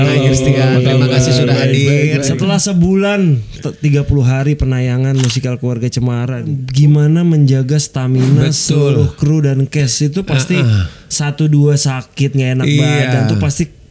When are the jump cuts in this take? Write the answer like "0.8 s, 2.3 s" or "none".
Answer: 2.3 s, 6.6 s